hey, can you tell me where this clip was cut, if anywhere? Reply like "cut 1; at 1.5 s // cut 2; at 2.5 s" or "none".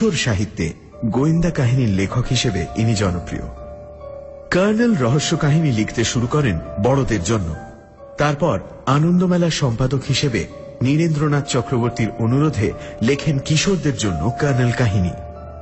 cut 1; at 10.2 s